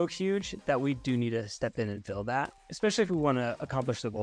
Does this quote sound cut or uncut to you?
cut